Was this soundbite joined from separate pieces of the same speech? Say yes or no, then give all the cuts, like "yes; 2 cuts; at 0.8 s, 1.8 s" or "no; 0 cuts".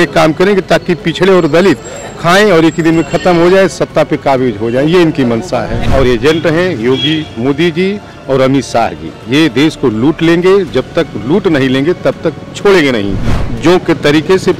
yes; 1 cut; at 5.8 s